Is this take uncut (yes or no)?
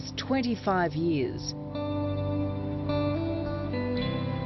no